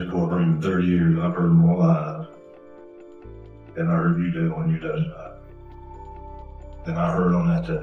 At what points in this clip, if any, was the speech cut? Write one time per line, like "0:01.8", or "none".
0:05.3
0:06.8